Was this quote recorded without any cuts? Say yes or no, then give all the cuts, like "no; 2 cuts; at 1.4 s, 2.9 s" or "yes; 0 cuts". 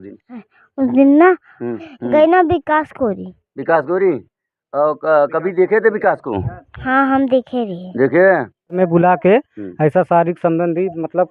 no; 2 cuts; at 1.9 s, 8.7 s